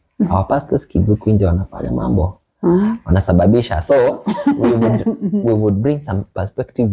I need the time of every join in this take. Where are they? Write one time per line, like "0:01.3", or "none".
none